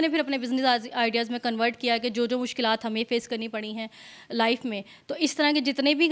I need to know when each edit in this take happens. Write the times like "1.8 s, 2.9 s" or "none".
none